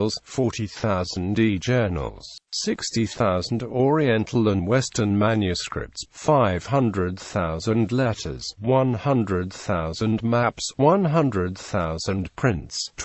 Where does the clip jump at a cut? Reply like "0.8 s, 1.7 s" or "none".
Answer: 5.1 s